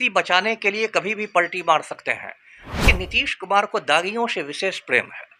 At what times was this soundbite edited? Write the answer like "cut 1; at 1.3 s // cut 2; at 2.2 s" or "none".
cut 1; at 2.8 s